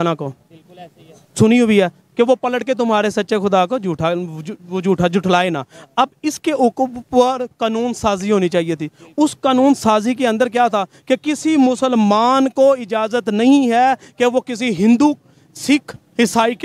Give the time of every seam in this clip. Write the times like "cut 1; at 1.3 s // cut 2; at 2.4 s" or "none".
none